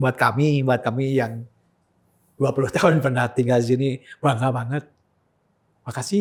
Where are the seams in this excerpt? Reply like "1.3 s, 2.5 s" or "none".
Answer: none